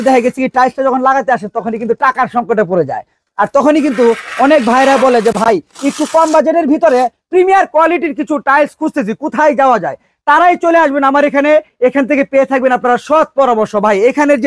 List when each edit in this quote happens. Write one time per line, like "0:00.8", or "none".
none